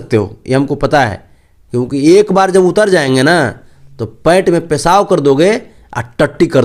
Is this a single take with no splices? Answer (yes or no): yes